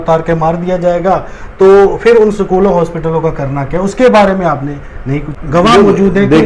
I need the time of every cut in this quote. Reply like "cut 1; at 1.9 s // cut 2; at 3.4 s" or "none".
cut 1; at 5.4 s